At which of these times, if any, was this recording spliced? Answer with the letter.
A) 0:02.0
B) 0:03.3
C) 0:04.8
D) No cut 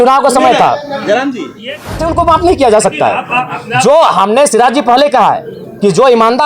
A